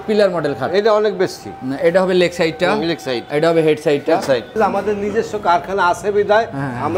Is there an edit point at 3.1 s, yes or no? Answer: no